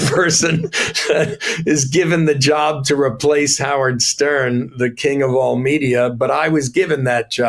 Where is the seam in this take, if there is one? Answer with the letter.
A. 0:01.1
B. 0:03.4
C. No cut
C